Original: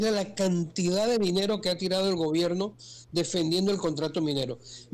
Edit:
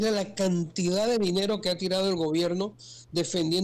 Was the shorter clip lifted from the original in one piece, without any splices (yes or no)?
yes